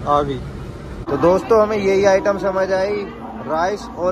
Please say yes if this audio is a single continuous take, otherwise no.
no